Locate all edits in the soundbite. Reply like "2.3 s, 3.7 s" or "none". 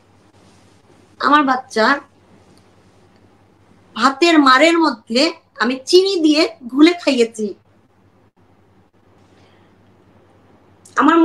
9.2 s